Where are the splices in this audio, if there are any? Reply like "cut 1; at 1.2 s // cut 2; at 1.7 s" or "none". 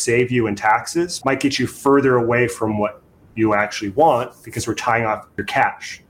cut 1; at 1.1 s // cut 2; at 5.3 s

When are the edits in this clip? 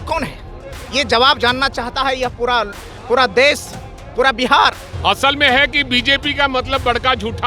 cut 1; at 4.9 s

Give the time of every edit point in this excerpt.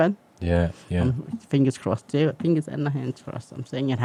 none

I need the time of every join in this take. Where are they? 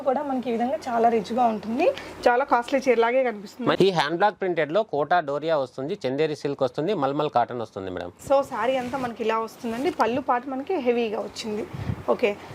cut 1; at 3.8 s // cut 2; at 8.1 s

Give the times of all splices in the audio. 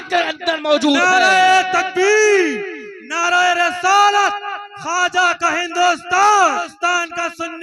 cut 1; at 6.7 s

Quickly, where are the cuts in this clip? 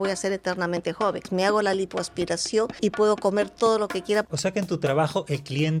cut 1; at 1.2 s // cut 2; at 2.7 s // cut 3; at 4.3 s

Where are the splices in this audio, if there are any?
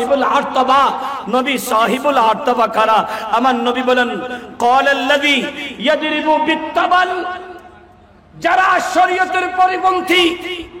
none

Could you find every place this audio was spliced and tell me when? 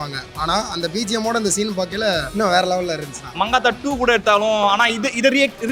cut 1; at 2.3 s // cut 2; at 3.2 s

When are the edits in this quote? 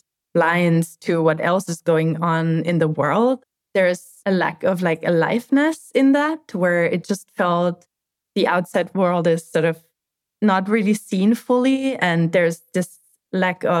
cut 1; at 3.6 s

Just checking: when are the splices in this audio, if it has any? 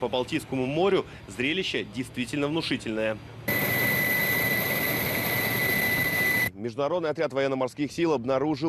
cut 1; at 3.8 s

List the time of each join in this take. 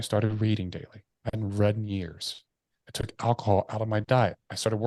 cut 1; at 2.8 s

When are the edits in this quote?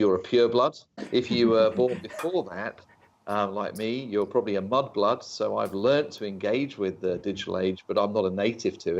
cut 1; at 1.0 s

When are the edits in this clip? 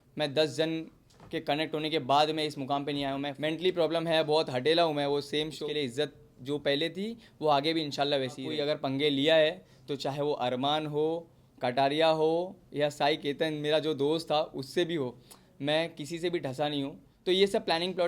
cut 1; at 3.3 s // cut 2; at 5.6 s // cut 3; at 8.5 s // cut 4; at 17.1 s

